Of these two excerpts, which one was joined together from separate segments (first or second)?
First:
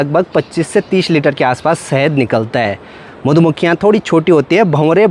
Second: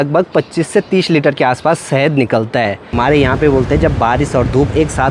second